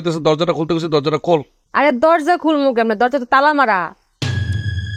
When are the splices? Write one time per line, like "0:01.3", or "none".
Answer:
0:01.6